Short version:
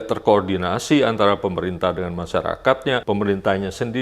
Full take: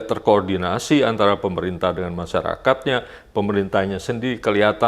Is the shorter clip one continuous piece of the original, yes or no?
no